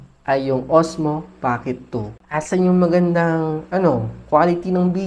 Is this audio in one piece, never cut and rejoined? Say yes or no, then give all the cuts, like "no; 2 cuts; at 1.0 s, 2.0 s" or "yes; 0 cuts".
no; 1 cut; at 2.2 s